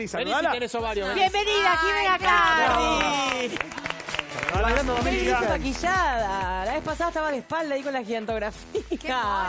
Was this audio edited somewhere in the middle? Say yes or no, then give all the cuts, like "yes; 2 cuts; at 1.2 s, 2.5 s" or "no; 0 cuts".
yes; 1 cut; at 1.1 s